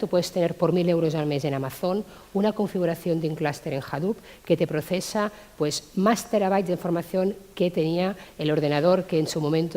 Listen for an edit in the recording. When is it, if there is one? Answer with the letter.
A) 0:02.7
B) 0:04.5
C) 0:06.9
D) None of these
C